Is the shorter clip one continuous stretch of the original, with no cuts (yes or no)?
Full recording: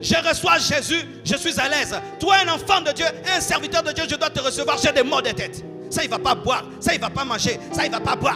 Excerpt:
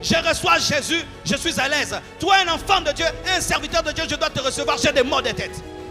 yes